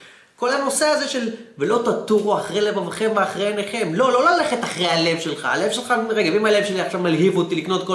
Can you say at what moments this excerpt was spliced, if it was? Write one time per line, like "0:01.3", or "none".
none